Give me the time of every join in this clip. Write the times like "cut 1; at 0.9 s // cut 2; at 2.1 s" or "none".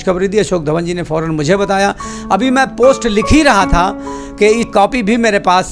cut 1; at 4.5 s